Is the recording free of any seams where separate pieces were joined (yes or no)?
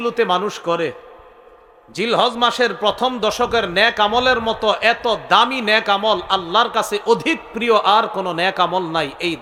yes